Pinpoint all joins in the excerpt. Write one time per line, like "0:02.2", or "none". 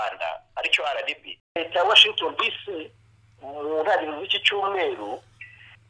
0:01.6

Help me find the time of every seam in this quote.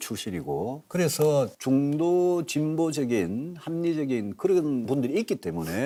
none

